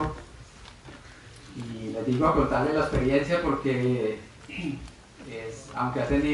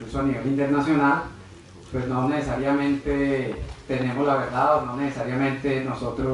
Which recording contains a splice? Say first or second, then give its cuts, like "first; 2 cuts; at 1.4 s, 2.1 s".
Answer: first; 1 cut; at 4.9 s